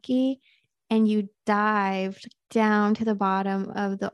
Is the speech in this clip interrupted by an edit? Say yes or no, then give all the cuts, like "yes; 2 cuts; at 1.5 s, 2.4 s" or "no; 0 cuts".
no; 0 cuts